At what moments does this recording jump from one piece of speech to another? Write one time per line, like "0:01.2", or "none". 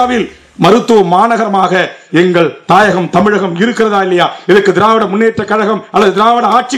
none